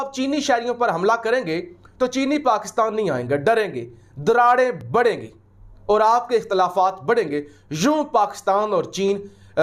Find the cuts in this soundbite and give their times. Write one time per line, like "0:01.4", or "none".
none